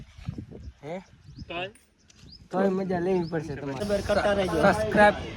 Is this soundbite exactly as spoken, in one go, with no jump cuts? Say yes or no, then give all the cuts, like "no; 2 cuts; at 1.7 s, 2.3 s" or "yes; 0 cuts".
no; 1 cut; at 3.9 s